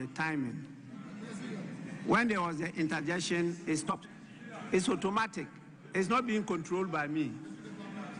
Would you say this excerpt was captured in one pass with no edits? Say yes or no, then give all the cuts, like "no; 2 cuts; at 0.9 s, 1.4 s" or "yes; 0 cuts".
no; 1 cut; at 3.8 s